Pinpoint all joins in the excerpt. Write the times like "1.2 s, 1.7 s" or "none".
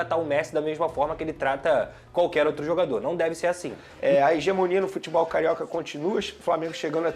3.8 s